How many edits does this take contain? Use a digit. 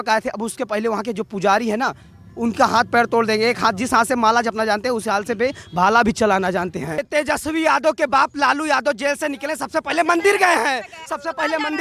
1